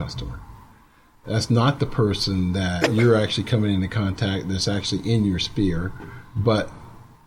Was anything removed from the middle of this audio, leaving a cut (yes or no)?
yes